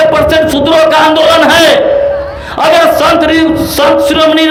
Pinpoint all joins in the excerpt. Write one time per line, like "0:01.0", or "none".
none